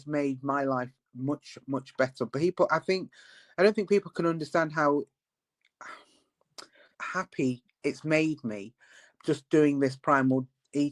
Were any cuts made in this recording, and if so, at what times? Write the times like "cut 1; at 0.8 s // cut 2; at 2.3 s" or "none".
cut 1; at 6.9 s

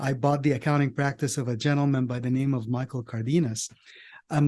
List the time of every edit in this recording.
none

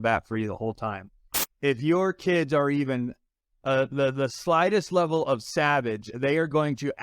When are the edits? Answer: cut 1; at 1.3 s

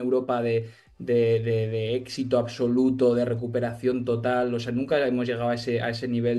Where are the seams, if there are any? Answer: none

